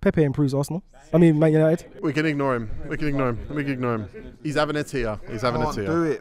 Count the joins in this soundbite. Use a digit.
1